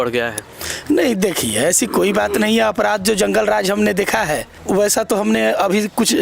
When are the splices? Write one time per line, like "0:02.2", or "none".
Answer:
0:04.5